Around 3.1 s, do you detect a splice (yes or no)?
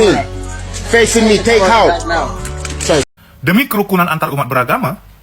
yes